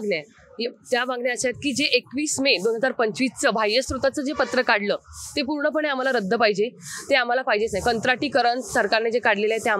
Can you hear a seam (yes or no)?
no